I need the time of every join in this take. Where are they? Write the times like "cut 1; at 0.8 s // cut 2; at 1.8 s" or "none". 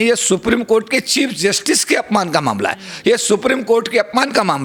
none